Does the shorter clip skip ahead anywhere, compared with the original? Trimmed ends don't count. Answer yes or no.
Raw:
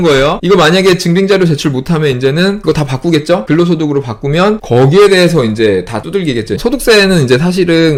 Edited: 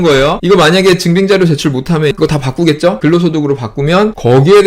yes